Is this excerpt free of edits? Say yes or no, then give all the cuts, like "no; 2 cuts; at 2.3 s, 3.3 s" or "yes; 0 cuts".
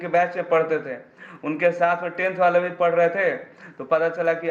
yes; 0 cuts